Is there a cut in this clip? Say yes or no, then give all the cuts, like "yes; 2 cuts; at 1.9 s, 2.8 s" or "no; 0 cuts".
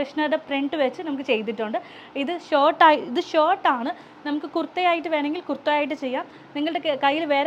no; 0 cuts